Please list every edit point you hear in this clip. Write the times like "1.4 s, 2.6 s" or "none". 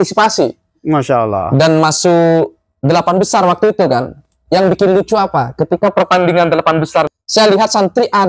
7.1 s

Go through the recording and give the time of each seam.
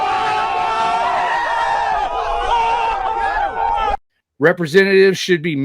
4.0 s

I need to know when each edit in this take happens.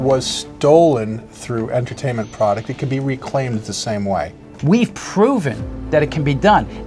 4.5 s

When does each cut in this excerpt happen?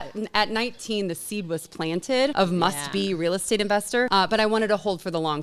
2.3 s, 4.1 s

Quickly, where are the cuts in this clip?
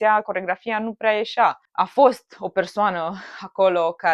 1.6 s

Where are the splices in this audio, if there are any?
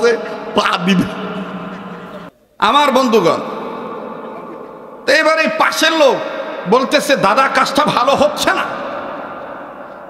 2.3 s

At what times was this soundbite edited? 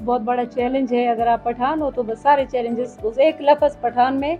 none

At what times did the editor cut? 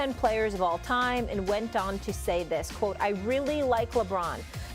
none

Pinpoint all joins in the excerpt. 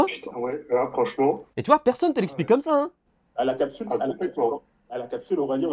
1.5 s

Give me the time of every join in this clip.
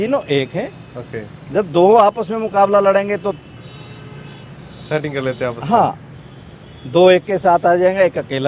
none

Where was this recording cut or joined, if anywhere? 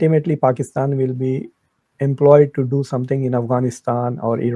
none

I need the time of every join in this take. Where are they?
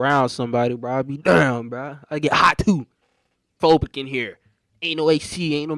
3.5 s

